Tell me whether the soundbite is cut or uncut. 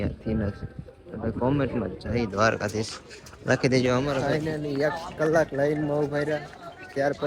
cut